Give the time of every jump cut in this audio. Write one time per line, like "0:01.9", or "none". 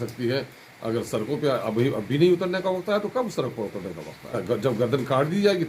0:04.3